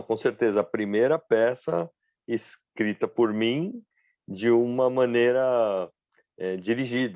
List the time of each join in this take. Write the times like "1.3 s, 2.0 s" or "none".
none